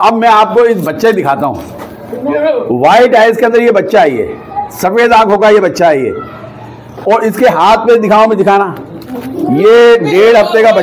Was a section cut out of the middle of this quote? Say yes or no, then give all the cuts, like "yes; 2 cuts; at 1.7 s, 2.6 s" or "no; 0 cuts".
no; 0 cuts